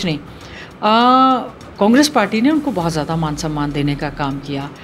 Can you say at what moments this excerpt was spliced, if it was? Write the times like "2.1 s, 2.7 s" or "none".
none